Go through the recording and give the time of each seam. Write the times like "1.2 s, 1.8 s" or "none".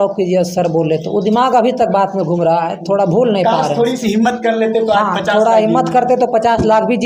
none